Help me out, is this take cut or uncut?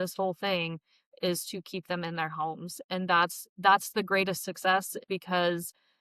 cut